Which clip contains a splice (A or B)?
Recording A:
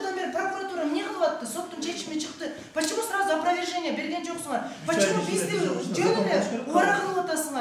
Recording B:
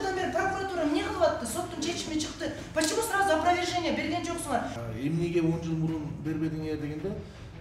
B